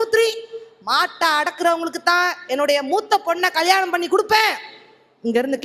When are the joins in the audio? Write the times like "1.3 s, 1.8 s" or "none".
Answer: none